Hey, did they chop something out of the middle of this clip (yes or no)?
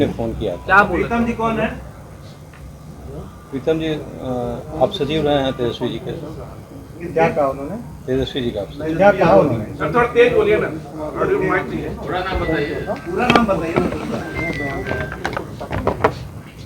no